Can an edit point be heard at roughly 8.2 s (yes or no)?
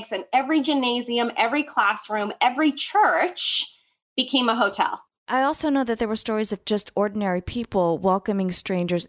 no